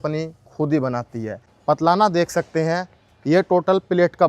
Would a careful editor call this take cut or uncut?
cut